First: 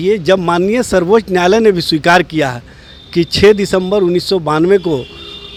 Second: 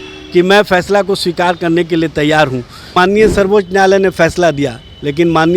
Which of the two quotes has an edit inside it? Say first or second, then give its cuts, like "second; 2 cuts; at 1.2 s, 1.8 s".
second; 1 cut; at 2.9 s